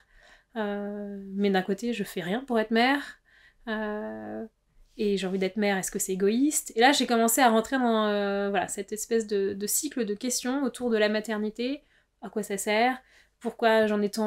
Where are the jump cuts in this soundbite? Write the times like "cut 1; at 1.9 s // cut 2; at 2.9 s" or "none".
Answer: none